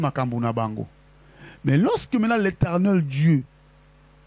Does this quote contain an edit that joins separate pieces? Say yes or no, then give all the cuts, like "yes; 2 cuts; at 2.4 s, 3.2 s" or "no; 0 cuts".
no; 0 cuts